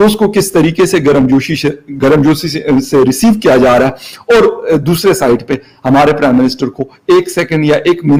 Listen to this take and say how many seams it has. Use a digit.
0